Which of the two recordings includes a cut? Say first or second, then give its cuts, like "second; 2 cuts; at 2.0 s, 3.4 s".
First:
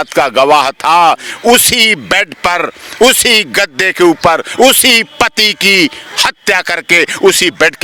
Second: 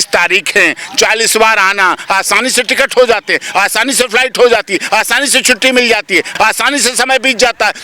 second; 1 cut; at 6.3 s